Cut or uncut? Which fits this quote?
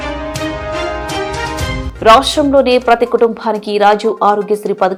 uncut